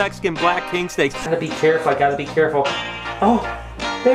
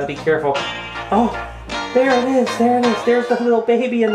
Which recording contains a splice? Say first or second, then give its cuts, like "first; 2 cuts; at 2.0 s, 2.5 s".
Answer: first; 1 cut; at 1.2 s